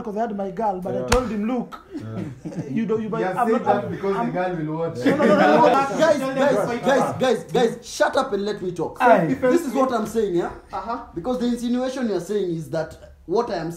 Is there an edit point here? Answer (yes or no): yes